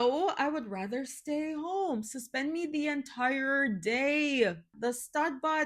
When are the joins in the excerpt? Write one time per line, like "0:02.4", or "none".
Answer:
0:04.7